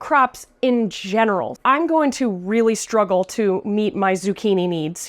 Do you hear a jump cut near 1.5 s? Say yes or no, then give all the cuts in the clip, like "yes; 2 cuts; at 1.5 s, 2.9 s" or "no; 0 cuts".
yes; 1 cut; at 1.5 s